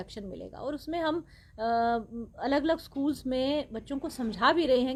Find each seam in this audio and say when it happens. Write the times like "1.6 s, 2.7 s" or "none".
none

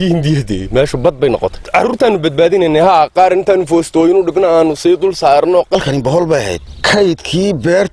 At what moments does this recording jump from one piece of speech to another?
1.6 s, 5.8 s, 6.7 s

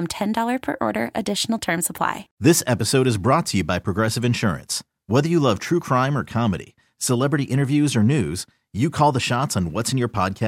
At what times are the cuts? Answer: 2.2 s

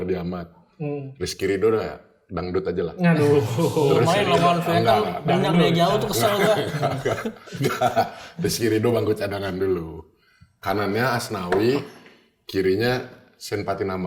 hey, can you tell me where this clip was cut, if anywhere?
none

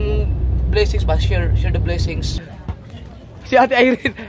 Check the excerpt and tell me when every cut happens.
2.4 s

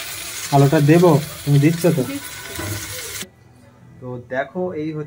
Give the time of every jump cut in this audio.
3.4 s

